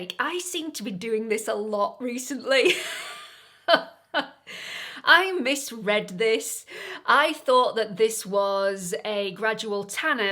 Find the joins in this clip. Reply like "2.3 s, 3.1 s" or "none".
none